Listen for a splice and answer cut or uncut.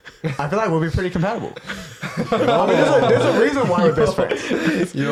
uncut